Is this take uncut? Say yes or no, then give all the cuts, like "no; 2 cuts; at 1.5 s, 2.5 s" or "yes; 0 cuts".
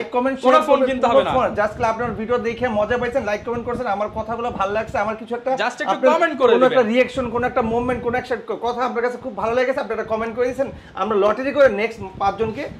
yes; 0 cuts